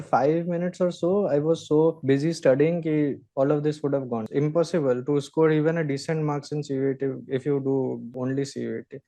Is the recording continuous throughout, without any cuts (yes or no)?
no